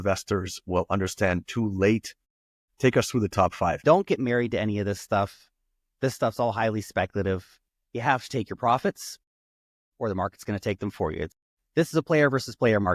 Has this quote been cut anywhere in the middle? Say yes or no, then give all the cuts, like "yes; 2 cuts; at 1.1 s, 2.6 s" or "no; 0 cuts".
yes; 3 cuts; at 3.8 s, 7.5 s, 11.4 s